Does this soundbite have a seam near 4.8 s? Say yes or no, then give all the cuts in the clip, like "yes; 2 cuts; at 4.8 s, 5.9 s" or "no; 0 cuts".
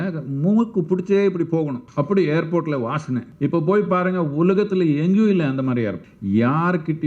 no; 3 cuts; at 1.8 s, 3.3 s, 6.1 s